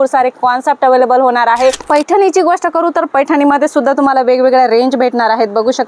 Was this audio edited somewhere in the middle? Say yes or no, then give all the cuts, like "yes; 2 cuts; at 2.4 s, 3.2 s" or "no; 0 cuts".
yes; 1 cut; at 1.8 s